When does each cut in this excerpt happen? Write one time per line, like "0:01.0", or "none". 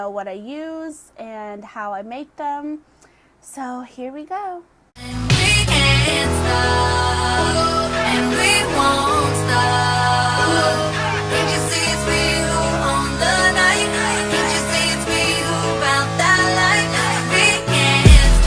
0:06.6